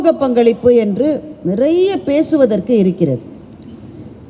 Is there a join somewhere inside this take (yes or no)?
no